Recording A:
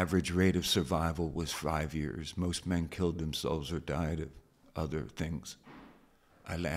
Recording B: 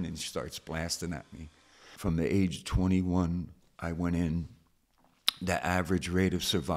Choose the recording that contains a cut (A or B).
B